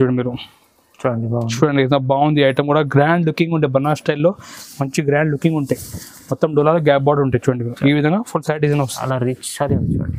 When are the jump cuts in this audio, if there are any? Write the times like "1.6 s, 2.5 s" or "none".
9.0 s